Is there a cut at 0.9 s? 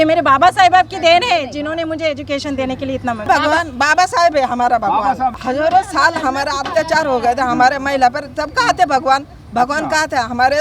no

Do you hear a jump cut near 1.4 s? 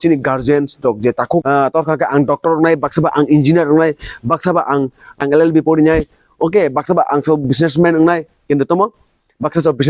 yes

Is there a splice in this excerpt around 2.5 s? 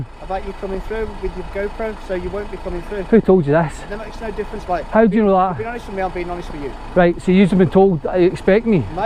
no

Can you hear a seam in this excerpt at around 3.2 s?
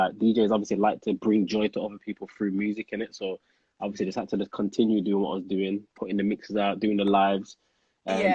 no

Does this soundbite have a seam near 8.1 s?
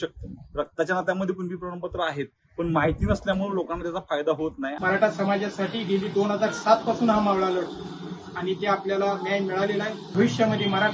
no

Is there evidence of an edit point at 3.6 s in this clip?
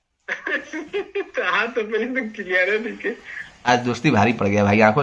yes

